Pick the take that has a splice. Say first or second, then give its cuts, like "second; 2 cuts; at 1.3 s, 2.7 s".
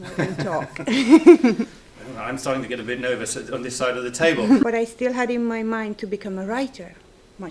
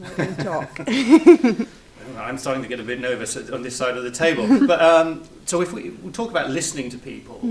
first; 1 cut; at 4.6 s